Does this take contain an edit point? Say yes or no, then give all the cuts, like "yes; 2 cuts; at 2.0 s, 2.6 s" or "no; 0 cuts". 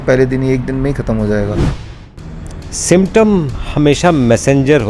yes; 1 cut; at 1.8 s